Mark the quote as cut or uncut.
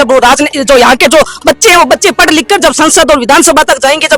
uncut